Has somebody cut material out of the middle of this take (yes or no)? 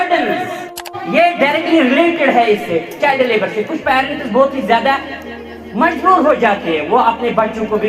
yes